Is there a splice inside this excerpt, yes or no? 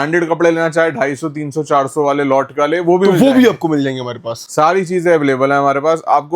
no